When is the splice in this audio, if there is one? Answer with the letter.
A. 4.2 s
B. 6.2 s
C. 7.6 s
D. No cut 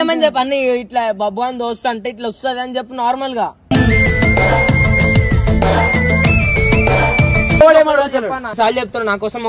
C